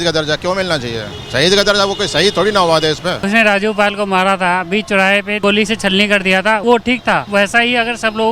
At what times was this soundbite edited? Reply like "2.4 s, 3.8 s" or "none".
3.2 s, 5.4 s, 6.7 s